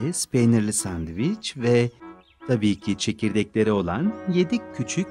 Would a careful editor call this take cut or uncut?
uncut